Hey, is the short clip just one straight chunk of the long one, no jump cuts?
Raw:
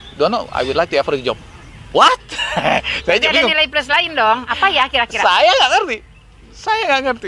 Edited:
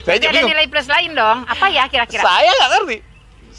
yes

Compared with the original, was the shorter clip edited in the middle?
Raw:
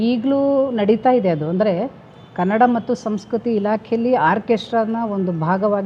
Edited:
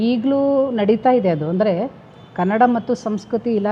no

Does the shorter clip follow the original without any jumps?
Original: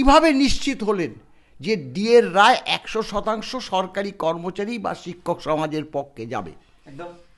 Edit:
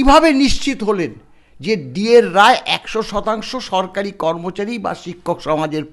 yes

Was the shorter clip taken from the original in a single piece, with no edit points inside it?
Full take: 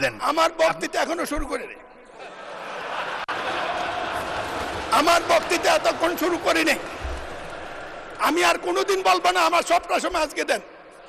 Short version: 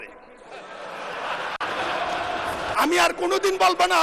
no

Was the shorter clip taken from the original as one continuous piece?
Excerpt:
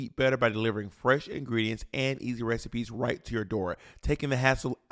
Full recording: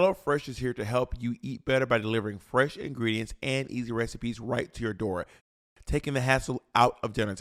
no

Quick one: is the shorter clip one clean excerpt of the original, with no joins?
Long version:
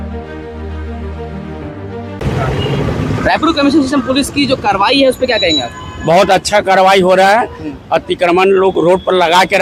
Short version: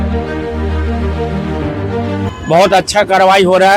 no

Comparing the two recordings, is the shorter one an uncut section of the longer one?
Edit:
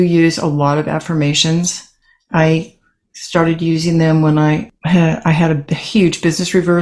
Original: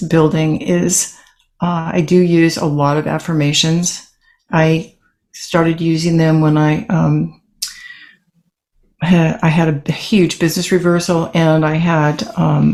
no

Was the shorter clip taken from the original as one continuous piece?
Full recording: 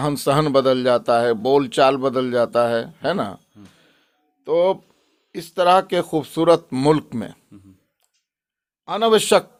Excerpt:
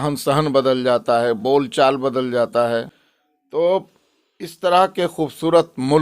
no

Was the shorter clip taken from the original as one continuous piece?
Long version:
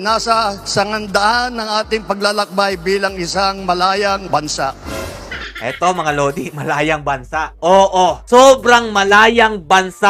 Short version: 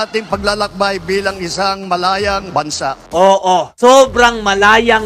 no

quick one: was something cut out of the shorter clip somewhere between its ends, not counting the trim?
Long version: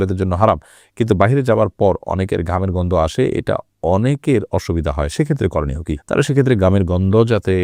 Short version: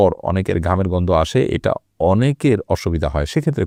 no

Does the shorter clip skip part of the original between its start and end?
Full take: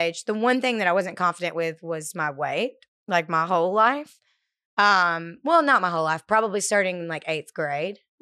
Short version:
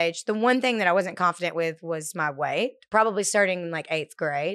yes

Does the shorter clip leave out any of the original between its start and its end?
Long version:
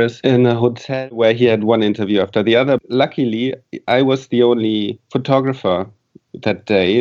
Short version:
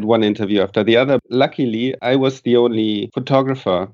yes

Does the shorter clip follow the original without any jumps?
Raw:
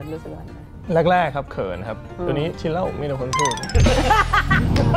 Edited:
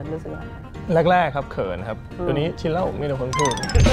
yes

